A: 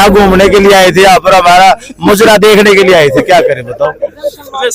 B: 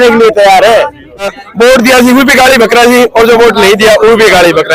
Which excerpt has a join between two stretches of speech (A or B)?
B